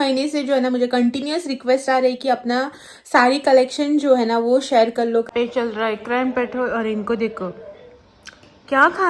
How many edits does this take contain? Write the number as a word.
one